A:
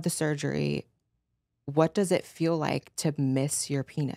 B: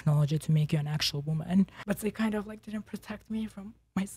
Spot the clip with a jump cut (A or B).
B